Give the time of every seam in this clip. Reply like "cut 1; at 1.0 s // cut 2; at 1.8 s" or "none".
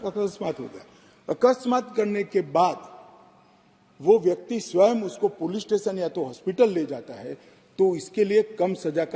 none